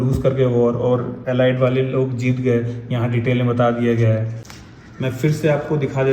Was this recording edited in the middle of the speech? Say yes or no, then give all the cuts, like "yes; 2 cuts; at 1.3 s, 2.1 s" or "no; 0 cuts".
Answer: yes; 1 cut; at 4.4 s